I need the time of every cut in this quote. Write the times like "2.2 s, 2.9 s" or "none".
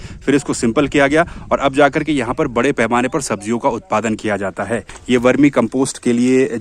4.9 s